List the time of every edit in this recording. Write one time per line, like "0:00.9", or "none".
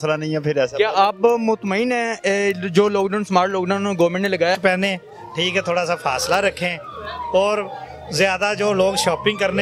0:04.5